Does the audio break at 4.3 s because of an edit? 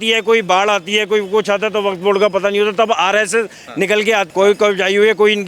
yes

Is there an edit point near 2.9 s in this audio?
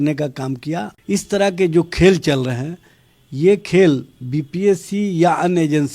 no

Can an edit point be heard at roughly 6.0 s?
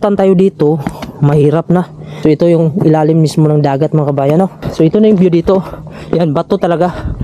no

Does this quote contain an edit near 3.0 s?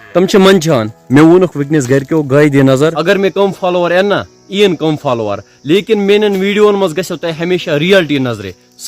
yes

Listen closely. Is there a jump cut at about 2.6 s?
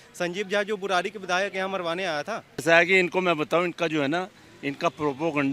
yes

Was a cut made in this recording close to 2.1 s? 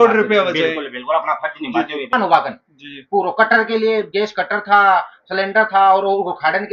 yes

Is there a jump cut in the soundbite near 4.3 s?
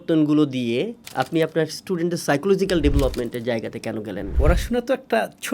yes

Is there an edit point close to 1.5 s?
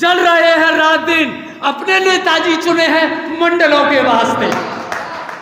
no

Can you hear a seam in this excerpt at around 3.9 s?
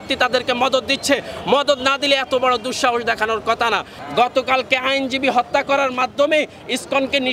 yes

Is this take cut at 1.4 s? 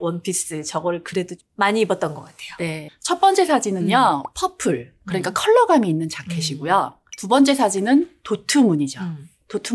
yes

